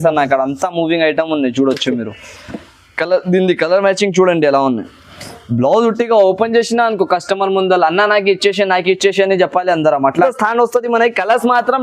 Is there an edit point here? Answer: yes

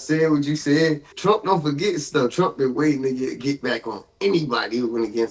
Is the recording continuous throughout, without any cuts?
no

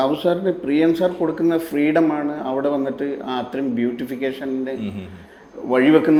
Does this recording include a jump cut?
no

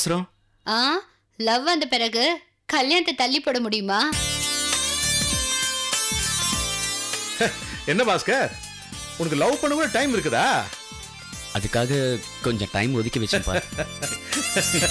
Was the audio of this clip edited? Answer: no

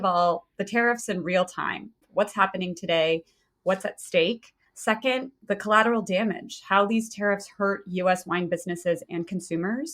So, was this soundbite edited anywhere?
yes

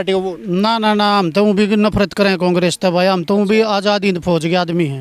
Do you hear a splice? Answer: no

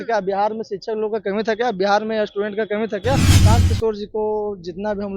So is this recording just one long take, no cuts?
no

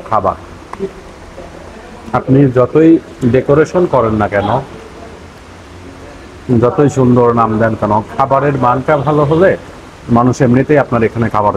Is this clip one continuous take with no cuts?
yes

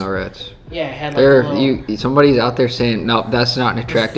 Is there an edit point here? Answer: no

